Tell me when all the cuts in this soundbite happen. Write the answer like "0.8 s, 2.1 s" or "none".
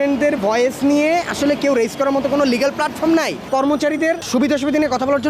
3.5 s, 4.3 s